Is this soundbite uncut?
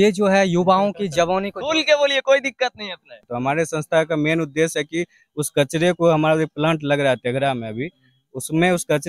no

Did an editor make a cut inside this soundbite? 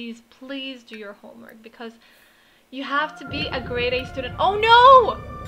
no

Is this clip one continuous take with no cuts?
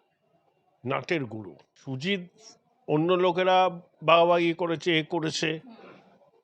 no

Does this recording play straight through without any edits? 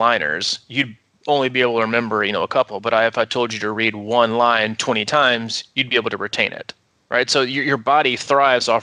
yes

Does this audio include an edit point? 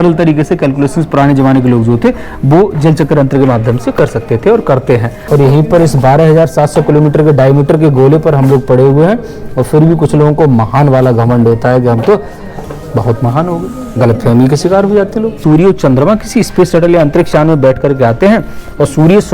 yes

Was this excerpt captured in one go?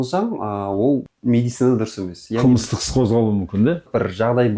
no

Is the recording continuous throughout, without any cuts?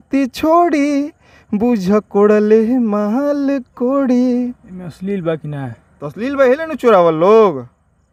yes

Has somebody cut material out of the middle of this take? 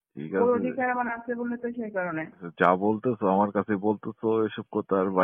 yes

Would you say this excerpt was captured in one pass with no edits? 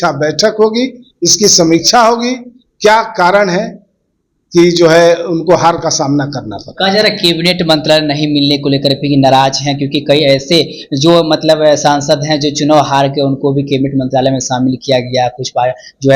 yes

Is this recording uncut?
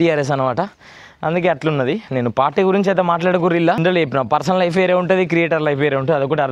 no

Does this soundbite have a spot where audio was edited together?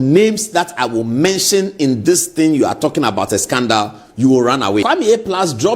yes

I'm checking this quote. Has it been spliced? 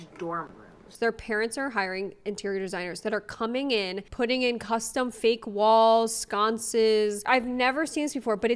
yes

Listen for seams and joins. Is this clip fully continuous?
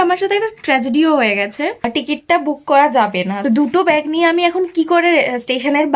no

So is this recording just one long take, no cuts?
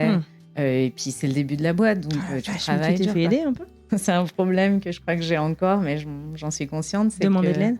no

